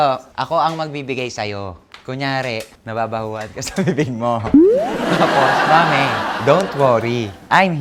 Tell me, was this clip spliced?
no; 0 cuts

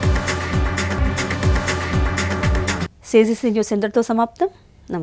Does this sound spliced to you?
no; 0 cuts

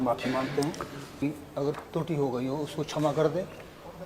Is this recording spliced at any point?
yes; 1 cut; at 1.2 s

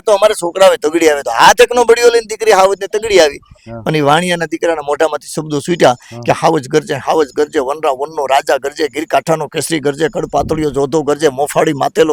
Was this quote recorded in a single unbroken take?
yes; 0 cuts

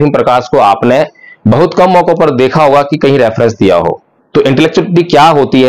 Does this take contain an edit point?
yes; 1 cut; at 4.1 s

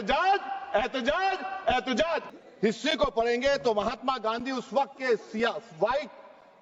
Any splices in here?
yes; 1 cut; at 2.2 s

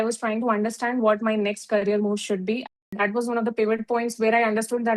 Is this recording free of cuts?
no; 1 cut; at 2.7 s

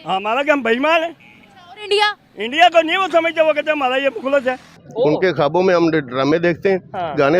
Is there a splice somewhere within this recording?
yes; 1 cut; at 4.8 s

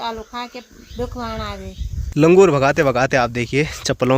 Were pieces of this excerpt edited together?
yes; 1 cut; at 2.0 s

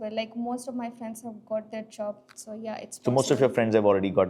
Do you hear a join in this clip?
no; 0 cuts

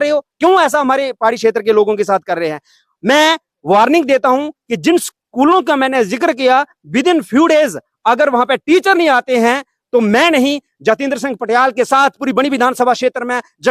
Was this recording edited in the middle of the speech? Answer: no; 0 cuts

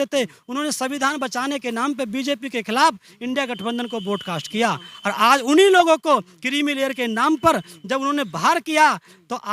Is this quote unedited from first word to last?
yes; 0 cuts

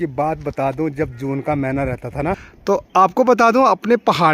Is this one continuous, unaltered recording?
no; 1 cut; at 2.5 s

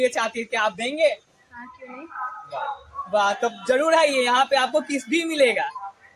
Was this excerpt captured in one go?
yes; 0 cuts

